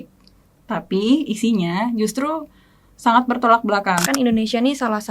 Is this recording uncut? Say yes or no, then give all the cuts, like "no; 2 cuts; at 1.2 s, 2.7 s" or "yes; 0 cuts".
no; 1 cut; at 4.0 s